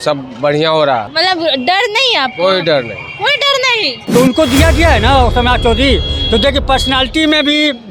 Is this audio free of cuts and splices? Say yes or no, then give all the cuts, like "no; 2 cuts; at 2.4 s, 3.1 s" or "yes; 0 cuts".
no; 2 cuts; at 1.1 s, 3.9 s